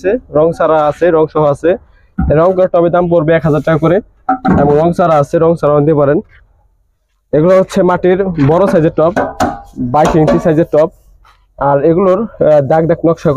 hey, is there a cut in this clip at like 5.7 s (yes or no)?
no